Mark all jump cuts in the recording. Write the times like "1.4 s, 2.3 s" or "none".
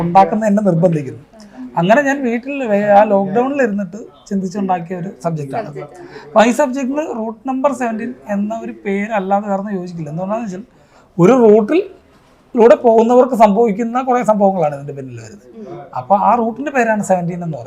none